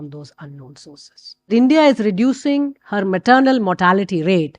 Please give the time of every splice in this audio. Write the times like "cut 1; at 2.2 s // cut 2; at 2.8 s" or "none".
cut 1; at 1.5 s